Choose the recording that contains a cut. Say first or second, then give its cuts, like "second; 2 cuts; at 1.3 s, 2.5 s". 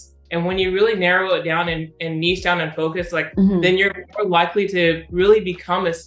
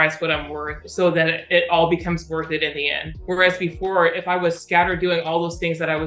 second; 1 cut; at 3.0 s